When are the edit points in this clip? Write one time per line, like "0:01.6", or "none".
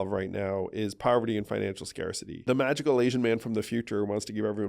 0:02.3